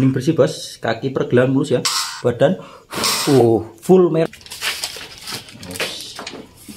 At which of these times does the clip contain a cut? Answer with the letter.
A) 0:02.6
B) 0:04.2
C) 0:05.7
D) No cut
B